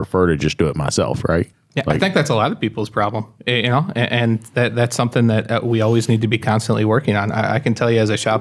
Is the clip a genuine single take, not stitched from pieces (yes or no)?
no